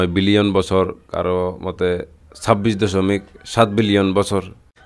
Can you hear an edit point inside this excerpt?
no; 0 cuts

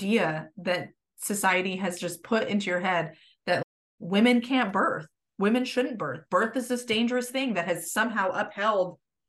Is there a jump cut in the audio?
no; 0 cuts

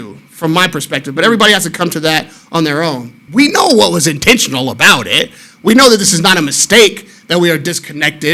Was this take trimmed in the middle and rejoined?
yes; 1 cut; at 3.1 s

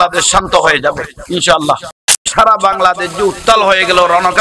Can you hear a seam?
yes; 1 cut; at 2.1 s

